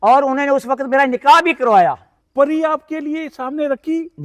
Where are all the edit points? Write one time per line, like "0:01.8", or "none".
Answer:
0:02.1